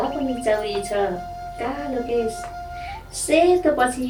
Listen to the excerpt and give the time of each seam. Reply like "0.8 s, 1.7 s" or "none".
none